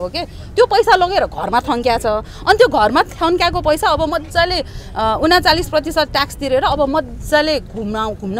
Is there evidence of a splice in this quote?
no; 0 cuts

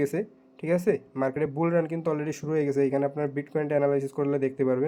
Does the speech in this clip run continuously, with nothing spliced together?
yes; 0 cuts

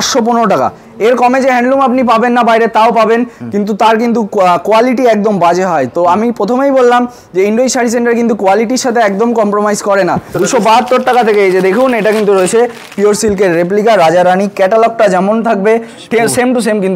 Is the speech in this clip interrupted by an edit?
yes; 1 cut; at 10.3 s

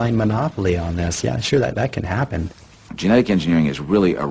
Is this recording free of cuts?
no; 1 cut; at 2.8 s

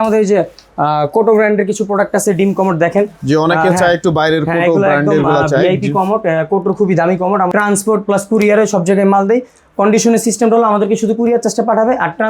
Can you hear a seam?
yes; 1 cut; at 7.5 s

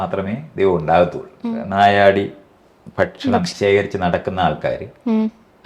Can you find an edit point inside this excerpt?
yes; 1 cut; at 1.5 s

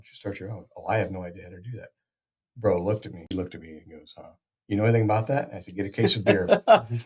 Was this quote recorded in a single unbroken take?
no; 1 cut; at 3.3 s

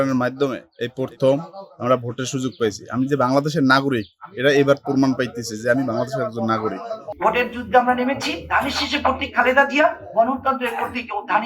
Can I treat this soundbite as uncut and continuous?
no; 2 cuts; at 7.1 s, 8.4 s

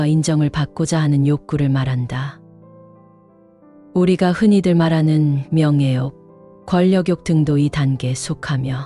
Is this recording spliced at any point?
no; 0 cuts

